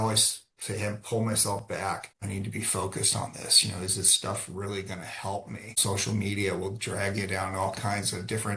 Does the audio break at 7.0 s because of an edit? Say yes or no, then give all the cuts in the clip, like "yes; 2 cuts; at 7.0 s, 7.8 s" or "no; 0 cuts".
no; 2 cuts; at 2.1 s, 5.8 s